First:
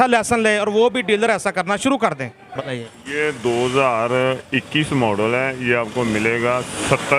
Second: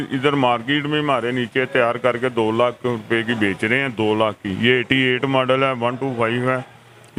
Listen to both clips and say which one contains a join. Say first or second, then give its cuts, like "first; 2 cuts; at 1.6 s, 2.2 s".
first; 1 cut; at 2.6 s